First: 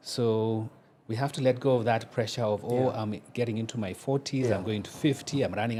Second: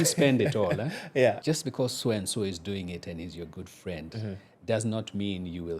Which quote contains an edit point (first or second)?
second